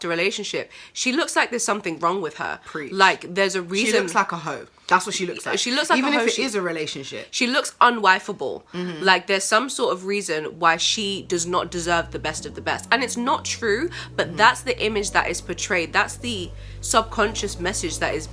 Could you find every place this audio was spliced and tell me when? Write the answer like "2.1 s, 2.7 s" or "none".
none